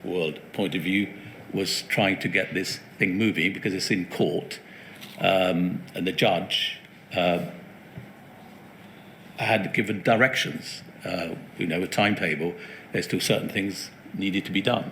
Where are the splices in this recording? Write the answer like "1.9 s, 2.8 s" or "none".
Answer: none